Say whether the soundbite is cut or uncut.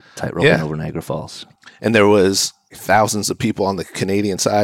cut